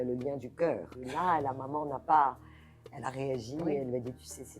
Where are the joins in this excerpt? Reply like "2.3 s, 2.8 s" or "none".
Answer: 0.9 s